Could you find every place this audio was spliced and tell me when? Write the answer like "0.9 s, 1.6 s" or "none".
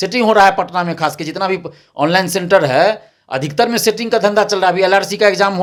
none